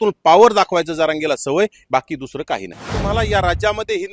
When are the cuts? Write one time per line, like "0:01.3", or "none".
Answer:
0:02.9